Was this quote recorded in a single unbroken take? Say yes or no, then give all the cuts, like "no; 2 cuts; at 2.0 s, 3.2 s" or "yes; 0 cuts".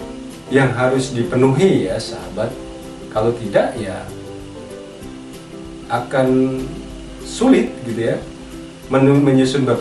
no; 2 cuts; at 4.1 s, 5.5 s